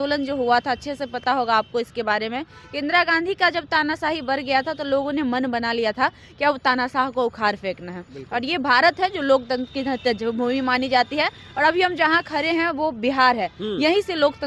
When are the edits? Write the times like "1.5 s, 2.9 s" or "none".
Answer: none